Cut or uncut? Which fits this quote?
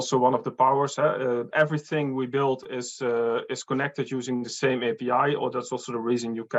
uncut